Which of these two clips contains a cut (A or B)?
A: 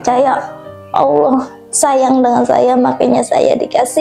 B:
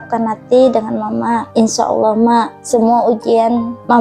B